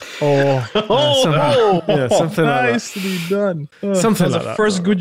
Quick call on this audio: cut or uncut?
cut